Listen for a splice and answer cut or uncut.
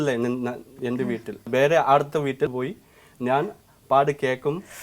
cut